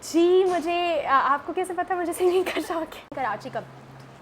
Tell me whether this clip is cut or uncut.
cut